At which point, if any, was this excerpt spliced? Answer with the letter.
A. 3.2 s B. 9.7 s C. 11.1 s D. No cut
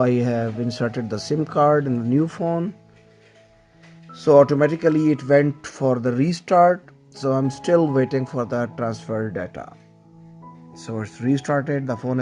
D